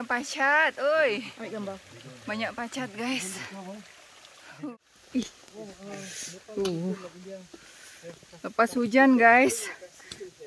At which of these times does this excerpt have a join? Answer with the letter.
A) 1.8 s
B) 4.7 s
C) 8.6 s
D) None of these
B